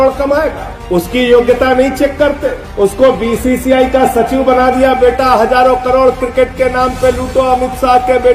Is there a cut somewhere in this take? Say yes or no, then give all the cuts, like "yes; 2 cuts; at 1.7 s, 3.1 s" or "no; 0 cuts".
no; 0 cuts